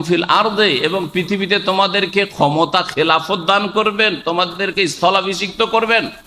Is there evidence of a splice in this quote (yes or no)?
no